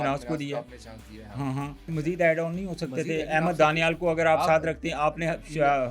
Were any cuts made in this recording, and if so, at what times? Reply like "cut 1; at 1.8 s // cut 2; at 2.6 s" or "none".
cut 1; at 1.9 s